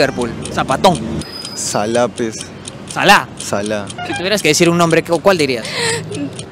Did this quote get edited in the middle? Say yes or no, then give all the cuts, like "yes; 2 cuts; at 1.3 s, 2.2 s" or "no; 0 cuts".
yes; 2 cuts; at 1.2 s, 4.0 s